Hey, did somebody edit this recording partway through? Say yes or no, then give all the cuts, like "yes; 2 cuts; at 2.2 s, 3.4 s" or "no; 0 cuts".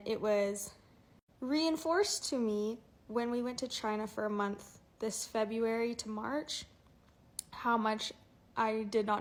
no; 0 cuts